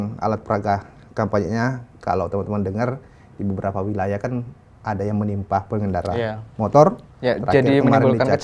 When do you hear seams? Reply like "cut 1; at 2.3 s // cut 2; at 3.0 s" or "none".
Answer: none

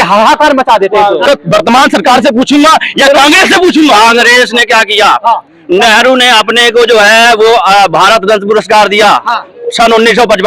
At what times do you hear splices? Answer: cut 1; at 1.2 s

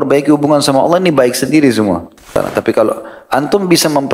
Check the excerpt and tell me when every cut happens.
cut 1; at 2.3 s

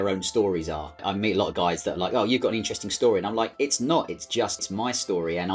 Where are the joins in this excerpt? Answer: cut 1; at 1.0 s // cut 2; at 4.6 s

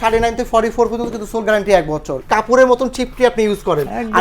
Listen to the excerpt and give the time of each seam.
cut 1; at 2.2 s

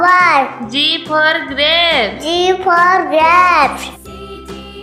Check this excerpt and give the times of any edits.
none

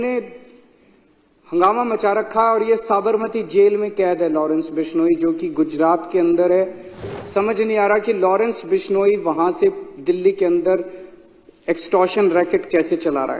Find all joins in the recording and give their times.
cut 1; at 7.1 s

